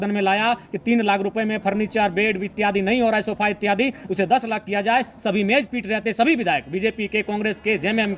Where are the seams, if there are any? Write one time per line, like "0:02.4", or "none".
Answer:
none